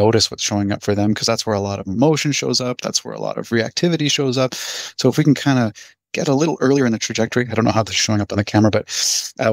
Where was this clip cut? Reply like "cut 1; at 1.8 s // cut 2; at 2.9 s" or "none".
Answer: none